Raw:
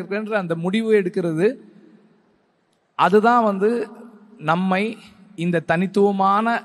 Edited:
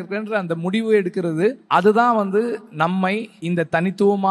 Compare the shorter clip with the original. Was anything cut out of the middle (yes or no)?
yes